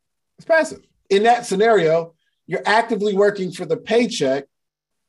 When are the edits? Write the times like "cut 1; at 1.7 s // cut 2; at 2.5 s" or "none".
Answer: cut 1; at 0.9 s